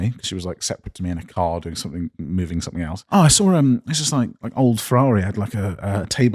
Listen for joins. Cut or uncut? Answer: cut